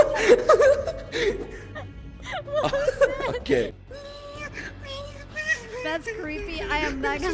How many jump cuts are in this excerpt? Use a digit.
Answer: 1